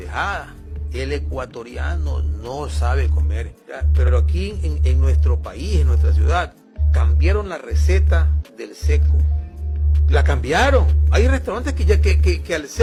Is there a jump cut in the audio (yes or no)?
no